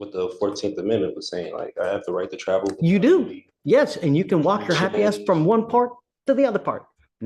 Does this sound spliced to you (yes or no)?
no